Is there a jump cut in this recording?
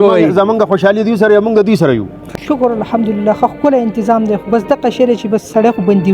yes; 1 cut; at 2.2 s

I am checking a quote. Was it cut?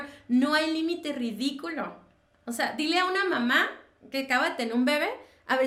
no; 0 cuts

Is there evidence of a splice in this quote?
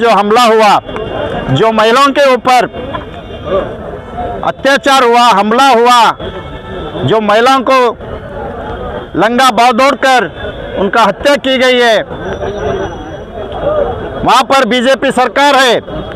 no; 0 cuts

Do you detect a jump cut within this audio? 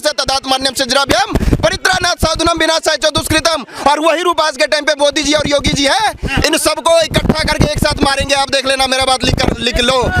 no; 0 cuts

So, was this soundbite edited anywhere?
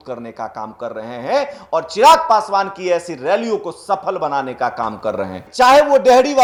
no; 0 cuts

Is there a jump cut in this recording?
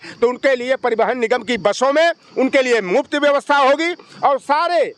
no; 0 cuts

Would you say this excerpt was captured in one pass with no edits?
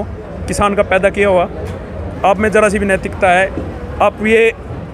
yes; 0 cuts

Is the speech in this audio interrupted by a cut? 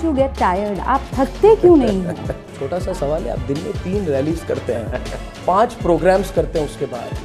yes; 1 cut; at 2.6 s

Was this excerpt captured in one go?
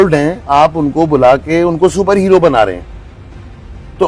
yes; 0 cuts

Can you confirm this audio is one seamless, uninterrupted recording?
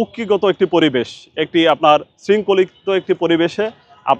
yes; 0 cuts

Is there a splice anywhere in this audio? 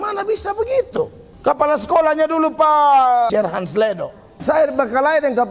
yes; 3 cuts; at 1.2 s, 3.3 s, 4.4 s

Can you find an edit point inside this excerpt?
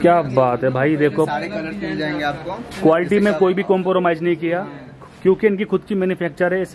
no; 0 cuts

